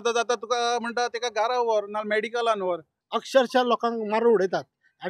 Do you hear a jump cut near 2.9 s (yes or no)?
yes